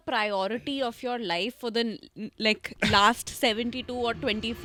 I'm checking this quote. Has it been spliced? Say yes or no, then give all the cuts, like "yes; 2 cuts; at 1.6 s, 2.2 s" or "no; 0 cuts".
no; 0 cuts